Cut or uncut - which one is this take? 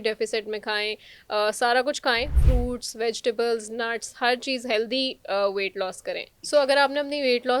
cut